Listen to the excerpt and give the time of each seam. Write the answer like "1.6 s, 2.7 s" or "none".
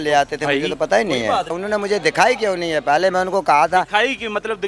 1.6 s